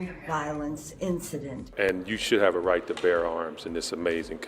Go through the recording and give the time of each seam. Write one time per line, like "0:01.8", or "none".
0:01.7